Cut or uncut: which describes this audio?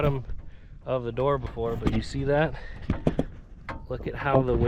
uncut